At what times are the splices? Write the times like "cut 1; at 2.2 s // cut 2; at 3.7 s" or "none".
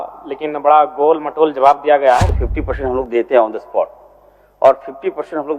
cut 1; at 2.3 s